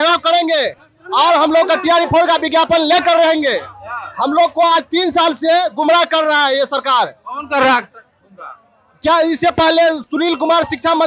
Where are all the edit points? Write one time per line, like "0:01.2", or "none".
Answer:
none